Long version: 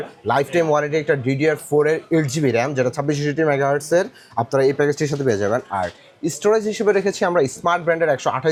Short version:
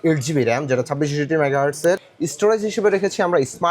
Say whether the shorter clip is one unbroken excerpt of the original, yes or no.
no